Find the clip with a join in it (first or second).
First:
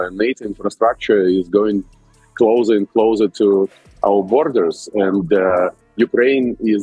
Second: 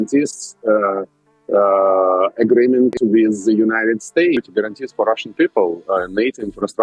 second